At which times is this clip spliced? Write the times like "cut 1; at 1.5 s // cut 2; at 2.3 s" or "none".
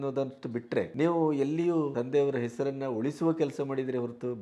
cut 1; at 0.9 s // cut 2; at 1.9 s

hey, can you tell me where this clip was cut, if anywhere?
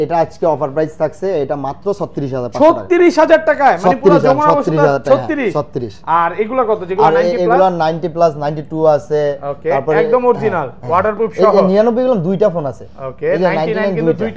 none

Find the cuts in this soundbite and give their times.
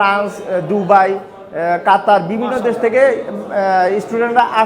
none

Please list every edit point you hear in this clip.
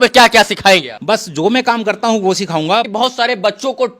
cut 1; at 0.9 s // cut 2; at 2.9 s

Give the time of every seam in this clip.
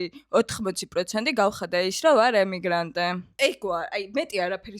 cut 1; at 3.2 s

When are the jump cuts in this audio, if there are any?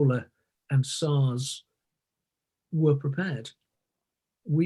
none

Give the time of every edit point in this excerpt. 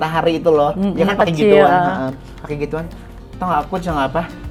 none

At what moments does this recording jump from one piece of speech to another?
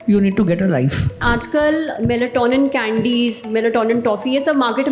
cut 1; at 1.2 s

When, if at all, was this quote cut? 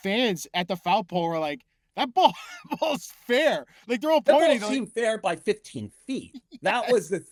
none

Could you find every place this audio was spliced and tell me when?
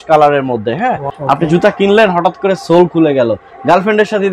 cut 1; at 1.1 s

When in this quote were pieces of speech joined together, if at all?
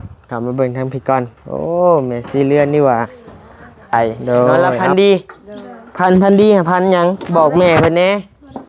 cut 1; at 4.8 s

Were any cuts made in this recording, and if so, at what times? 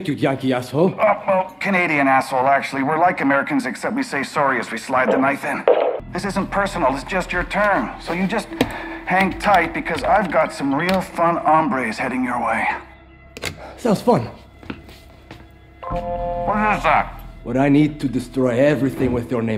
cut 1; at 6.1 s

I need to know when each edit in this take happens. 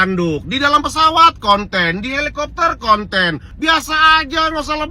cut 1; at 3.4 s

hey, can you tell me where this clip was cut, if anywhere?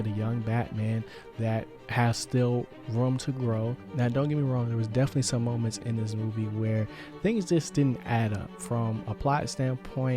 cut 1; at 3.8 s

